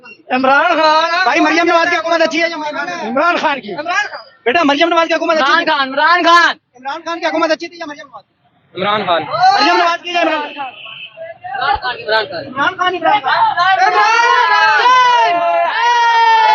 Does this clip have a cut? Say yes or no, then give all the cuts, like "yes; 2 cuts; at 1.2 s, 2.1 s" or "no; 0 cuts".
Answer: no; 0 cuts